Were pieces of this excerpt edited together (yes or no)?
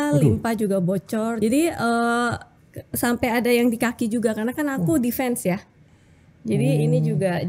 yes